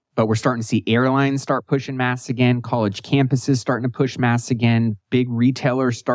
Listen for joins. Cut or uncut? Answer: uncut